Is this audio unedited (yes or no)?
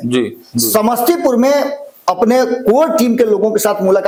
yes